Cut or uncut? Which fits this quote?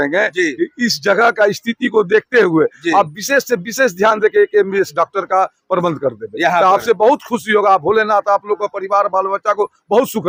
uncut